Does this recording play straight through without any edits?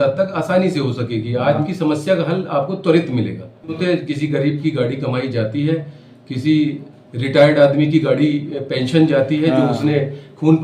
no; 2 cuts; at 1.6 s, 3.8 s

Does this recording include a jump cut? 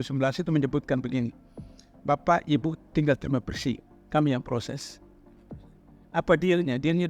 yes; 2 cuts; at 4.8 s, 6.1 s

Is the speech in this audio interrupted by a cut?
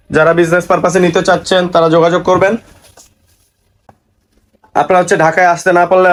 no; 0 cuts

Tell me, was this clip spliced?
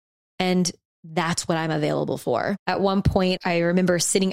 yes; 2 cuts; at 2.6 s, 3.4 s

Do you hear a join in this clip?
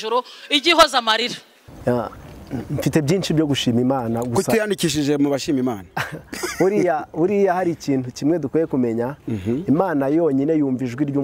yes; 1 cut; at 1.6 s

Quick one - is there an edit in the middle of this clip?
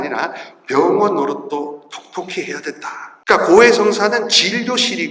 yes; 1 cut; at 3.1 s

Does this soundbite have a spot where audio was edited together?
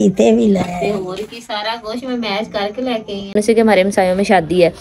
yes; 1 cut; at 3.3 s

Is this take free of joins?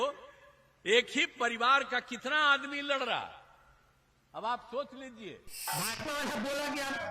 no; 1 cut; at 5.7 s

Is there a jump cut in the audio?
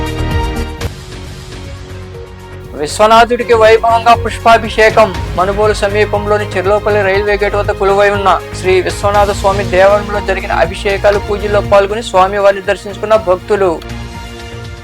no; 0 cuts

